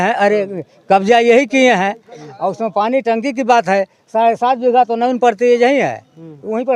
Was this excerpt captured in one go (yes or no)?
yes